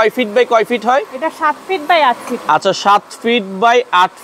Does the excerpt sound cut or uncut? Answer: uncut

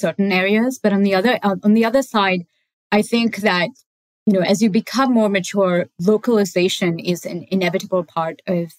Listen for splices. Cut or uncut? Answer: uncut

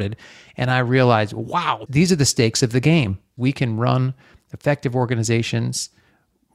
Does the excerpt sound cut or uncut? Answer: cut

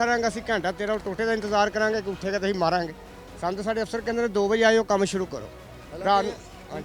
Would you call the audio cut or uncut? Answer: uncut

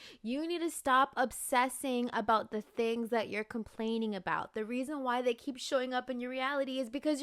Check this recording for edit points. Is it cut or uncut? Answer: uncut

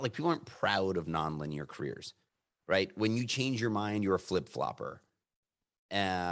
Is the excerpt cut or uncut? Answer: uncut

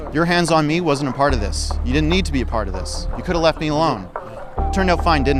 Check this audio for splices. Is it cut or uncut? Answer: uncut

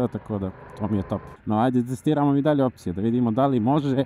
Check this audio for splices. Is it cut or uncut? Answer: uncut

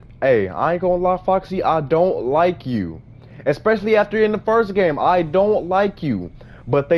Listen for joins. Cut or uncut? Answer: uncut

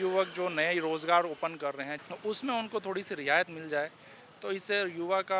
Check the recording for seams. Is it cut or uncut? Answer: cut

